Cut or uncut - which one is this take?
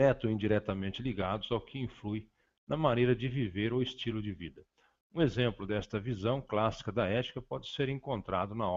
uncut